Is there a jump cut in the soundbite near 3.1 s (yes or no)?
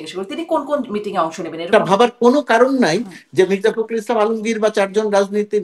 no